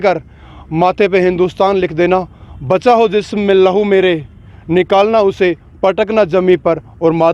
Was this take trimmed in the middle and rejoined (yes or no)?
no